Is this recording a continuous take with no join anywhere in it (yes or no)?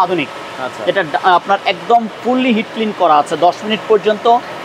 yes